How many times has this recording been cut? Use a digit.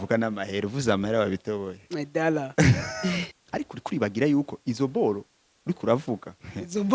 1